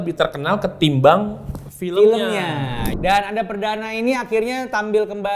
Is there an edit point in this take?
yes; 1 cut; at 2.8 s

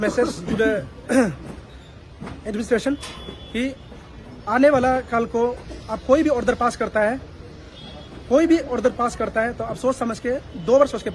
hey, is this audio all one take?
yes; 0 cuts

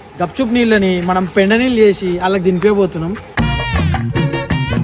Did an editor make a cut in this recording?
no; 0 cuts

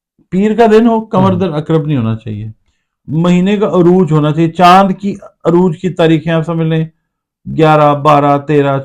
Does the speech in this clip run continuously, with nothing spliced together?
yes; 0 cuts

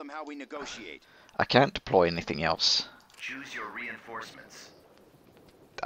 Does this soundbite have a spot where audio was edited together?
no; 0 cuts

